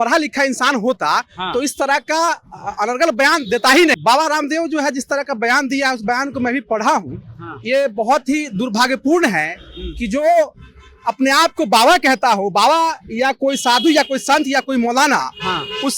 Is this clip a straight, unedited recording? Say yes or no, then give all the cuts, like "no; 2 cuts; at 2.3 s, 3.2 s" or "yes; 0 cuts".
no; 1 cut; at 4.0 s